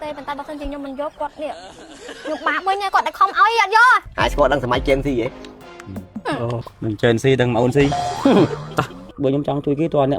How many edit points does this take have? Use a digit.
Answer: 1